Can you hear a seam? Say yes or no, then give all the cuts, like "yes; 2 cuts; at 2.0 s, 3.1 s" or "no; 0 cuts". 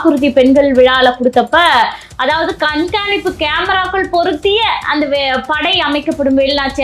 no; 0 cuts